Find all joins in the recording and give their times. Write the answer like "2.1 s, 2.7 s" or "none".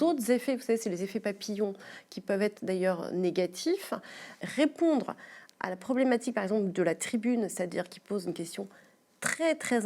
4.3 s